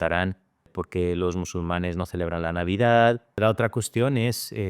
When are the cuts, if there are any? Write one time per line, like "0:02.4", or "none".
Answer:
0:03.4